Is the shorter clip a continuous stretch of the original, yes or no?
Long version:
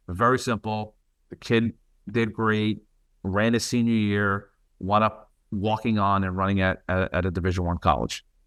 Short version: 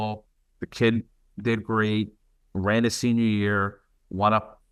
yes